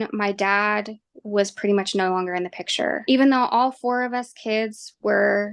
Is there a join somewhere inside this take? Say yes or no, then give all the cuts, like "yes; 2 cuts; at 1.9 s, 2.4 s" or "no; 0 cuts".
yes; 1 cut; at 3.0 s